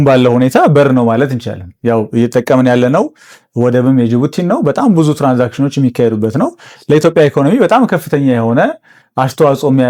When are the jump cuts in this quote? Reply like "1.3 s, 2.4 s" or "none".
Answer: none